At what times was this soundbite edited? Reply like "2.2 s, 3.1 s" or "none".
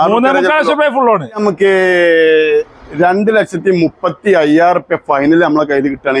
1.4 s

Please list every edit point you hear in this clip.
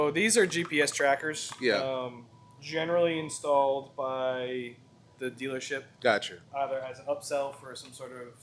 none

